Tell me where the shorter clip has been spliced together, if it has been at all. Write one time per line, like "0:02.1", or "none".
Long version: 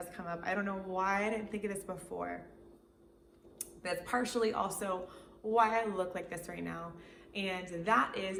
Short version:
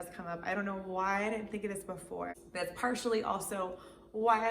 0:02.4